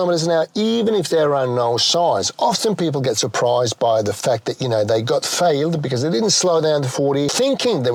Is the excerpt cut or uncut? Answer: uncut